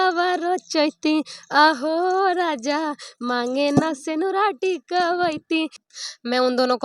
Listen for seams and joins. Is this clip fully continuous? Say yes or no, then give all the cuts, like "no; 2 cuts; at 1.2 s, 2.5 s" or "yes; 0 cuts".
no; 1 cut; at 5.8 s